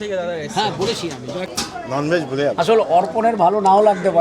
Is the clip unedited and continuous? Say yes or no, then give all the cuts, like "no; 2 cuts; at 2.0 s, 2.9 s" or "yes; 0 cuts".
no; 1 cut; at 1.5 s